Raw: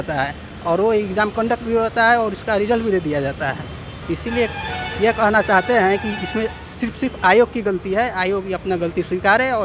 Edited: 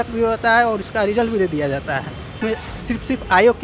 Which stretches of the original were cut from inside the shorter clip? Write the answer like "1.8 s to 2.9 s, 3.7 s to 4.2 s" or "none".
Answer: 3.8 s to 6.2 s